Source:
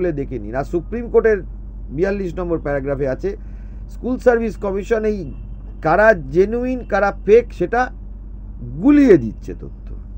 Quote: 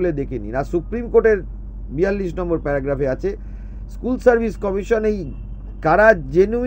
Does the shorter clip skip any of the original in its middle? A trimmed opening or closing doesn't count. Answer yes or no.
no